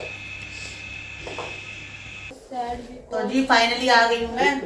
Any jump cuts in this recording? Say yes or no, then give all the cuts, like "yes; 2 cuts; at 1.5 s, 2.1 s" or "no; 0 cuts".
yes; 1 cut; at 2.4 s